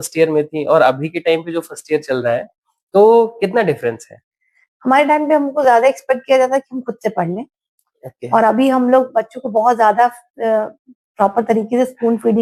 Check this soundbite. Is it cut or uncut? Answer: uncut